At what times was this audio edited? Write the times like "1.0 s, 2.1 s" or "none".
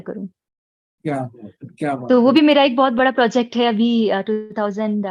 none